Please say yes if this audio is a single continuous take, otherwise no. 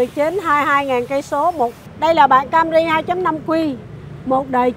no